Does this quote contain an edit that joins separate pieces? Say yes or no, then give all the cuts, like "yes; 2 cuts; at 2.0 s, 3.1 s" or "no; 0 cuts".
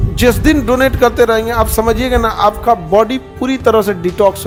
no; 0 cuts